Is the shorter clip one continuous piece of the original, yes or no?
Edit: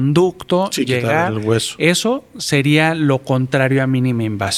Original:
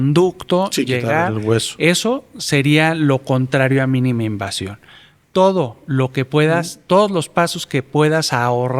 yes